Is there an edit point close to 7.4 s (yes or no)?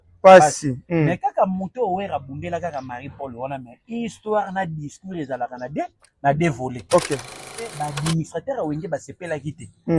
yes